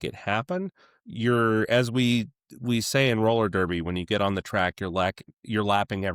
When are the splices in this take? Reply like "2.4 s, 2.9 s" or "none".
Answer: none